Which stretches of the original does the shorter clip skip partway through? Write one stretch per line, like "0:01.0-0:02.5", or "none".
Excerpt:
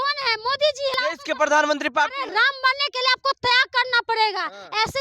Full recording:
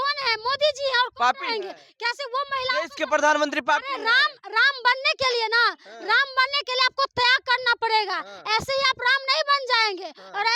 0:00.9-0:02.7
0:03.9-0:05.9